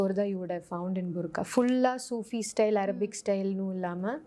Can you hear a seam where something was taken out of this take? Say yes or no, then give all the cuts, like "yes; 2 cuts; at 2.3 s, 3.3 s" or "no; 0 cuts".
no; 0 cuts